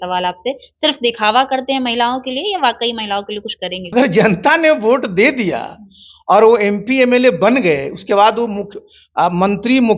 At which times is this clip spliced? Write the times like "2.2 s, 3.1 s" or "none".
3.8 s